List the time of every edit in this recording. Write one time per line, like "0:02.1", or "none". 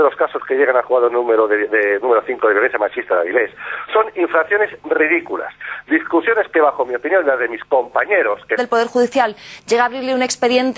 none